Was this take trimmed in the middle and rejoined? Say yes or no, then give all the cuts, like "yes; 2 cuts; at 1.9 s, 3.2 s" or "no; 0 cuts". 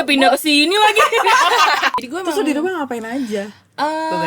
yes; 1 cut; at 2.0 s